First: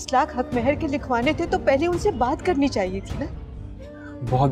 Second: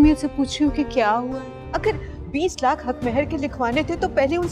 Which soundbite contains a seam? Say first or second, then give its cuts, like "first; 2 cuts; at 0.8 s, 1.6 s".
second; 1 cut; at 1.5 s